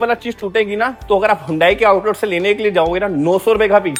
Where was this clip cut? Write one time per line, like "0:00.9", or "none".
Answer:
none